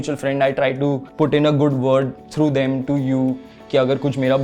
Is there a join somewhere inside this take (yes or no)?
yes